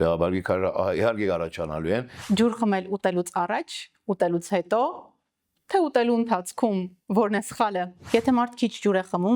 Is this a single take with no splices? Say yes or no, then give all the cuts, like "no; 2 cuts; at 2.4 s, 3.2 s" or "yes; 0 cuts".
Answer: no; 2 cuts; at 2.1 s, 8.0 s